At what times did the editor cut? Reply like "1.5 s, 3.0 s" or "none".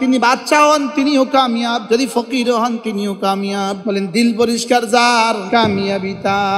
1.8 s, 3.8 s, 5.4 s